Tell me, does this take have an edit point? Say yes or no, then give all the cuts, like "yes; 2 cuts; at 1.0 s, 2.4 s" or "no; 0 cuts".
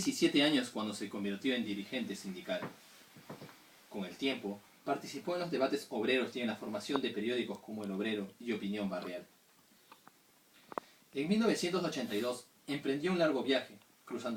yes; 1 cut; at 8.3 s